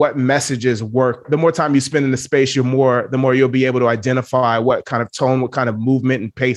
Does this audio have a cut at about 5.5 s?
no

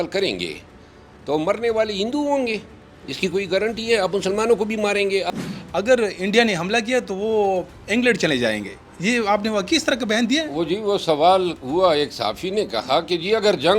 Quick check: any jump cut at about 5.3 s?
yes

